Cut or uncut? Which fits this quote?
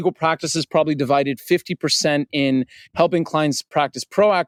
uncut